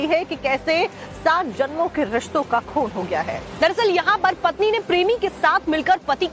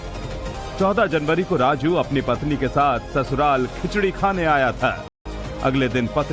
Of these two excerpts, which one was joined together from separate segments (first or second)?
first